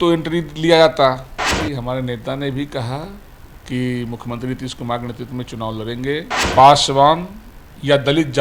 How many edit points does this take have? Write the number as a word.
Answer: two